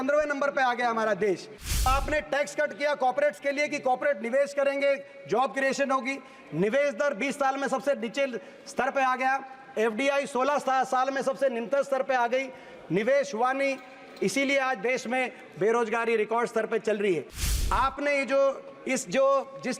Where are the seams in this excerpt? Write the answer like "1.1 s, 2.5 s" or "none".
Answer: 1.9 s